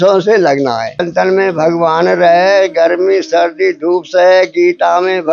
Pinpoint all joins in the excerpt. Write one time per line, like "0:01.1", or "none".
0:01.1